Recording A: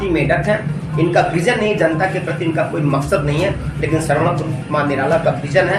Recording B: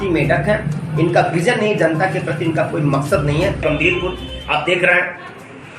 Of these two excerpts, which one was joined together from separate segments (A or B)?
B